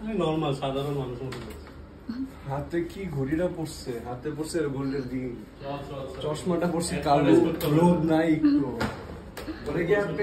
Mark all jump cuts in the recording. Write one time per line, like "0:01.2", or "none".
none